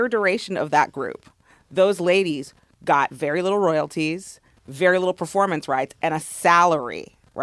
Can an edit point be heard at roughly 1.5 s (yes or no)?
no